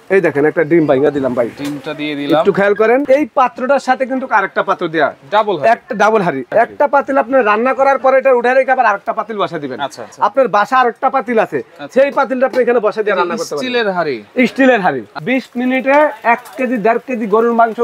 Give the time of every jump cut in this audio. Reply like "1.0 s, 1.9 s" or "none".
3.0 s, 6.4 s, 10.0 s, 15.1 s